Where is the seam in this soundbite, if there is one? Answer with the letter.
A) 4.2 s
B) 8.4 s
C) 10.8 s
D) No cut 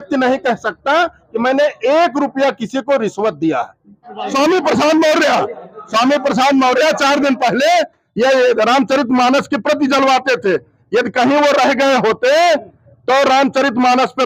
A